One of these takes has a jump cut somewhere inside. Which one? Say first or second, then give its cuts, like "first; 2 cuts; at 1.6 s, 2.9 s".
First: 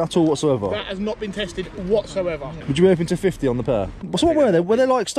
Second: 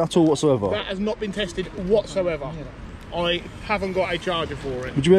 first; 2 cuts; at 2.6 s, 4.1 s